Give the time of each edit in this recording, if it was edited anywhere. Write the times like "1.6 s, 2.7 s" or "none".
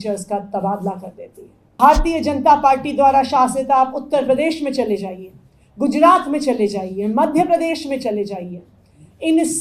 1.8 s